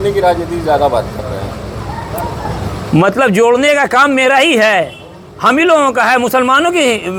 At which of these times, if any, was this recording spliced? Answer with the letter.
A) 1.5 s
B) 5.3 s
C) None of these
C